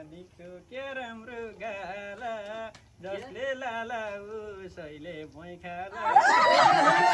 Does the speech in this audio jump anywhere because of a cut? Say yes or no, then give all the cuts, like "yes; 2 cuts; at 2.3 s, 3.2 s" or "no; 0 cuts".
no; 0 cuts